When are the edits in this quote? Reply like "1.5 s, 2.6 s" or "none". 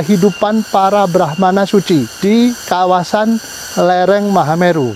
2.1 s